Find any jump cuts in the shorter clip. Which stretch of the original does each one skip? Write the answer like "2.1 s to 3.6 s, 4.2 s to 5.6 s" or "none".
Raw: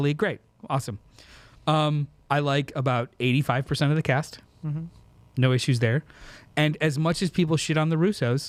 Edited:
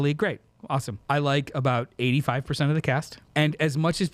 0.9 s to 2.1 s, 4.4 s to 6.4 s

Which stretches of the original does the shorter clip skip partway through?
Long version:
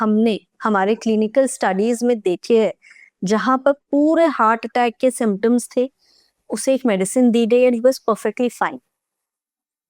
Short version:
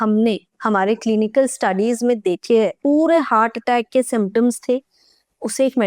2.8 s to 3.8 s

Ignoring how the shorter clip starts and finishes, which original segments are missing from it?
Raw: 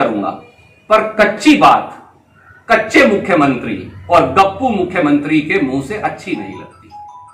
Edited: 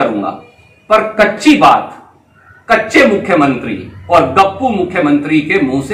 none

